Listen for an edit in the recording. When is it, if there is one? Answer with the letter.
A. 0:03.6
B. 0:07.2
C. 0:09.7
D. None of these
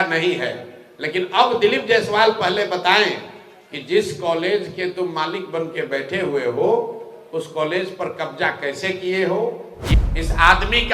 C